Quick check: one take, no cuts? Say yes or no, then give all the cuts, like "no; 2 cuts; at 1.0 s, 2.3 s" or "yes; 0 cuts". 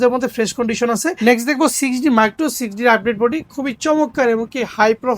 no; 1 cut; at 1.1 s